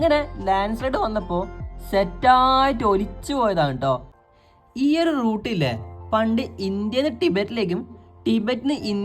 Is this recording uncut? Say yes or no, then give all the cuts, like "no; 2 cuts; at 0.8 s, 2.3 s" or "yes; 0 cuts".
no; 1 cut; at 4.1 s